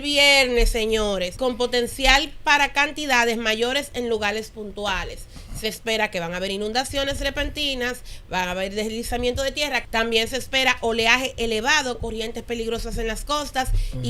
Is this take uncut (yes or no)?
no